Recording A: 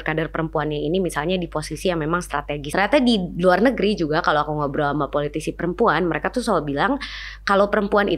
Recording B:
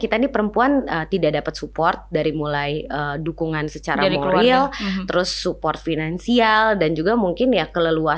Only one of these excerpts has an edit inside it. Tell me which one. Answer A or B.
A